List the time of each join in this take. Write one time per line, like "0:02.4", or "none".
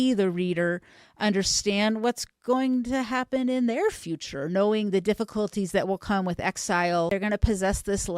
0:07.1